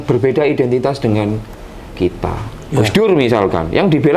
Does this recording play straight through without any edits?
yes; 0 cuts

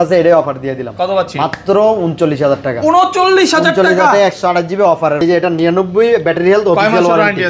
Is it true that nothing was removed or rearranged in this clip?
no; 1 cut; at 5.2 s

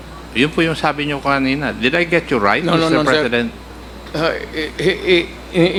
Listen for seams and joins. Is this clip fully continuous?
yes; 0 cuts

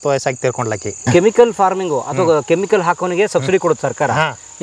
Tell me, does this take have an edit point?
yes; 1 cut; at 1.0 s

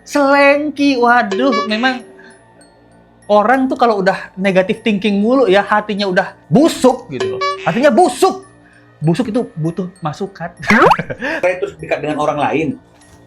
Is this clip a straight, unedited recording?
no; 1 cut; at 11.4 s

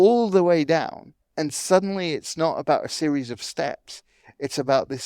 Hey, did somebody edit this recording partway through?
yes; 1 cut; at 1.2 s

